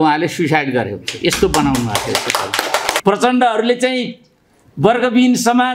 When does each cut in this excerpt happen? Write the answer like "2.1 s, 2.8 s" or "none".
3.0 s

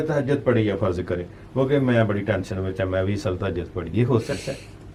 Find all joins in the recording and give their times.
none

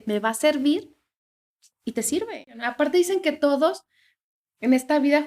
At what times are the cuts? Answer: 2.5 s

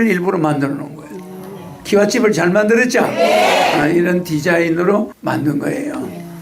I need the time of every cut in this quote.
5.1 s

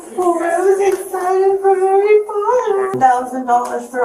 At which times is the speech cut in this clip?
2.9 s

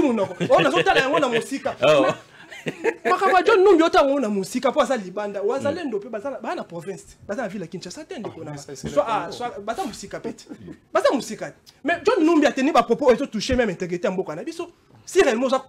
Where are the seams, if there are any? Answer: none

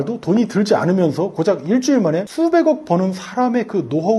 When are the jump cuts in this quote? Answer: none

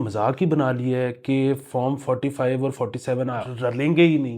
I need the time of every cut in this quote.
3.5 s

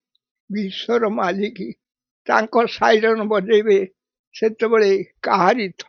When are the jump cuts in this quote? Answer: none

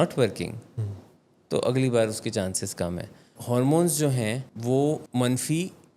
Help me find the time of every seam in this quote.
3.4 s, 4.5 s, 5.0 s

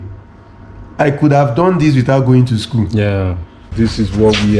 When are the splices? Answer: 3.7 s

